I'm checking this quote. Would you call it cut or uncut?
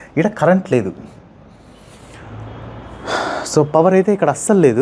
uncut